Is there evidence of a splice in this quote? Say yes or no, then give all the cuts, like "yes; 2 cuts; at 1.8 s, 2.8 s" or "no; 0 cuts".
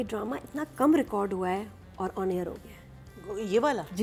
no; 0 cuts